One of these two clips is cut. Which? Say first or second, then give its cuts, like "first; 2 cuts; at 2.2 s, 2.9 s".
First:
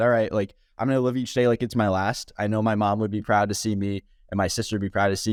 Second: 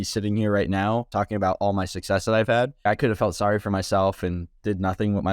second; 2 cuts; at 1.1 s, 2.9 s